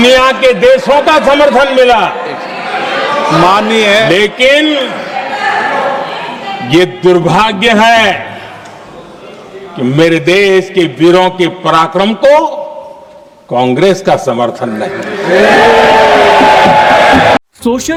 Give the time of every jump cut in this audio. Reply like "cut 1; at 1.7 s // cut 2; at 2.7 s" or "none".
none